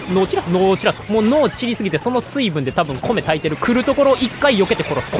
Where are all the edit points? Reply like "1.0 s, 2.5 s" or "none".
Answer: 1.0 s, 3.5 s